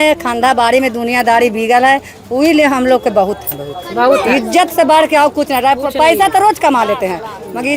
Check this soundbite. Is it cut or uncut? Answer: uncut